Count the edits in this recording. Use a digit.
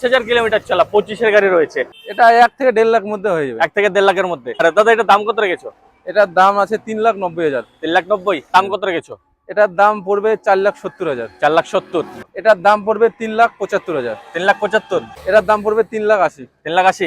5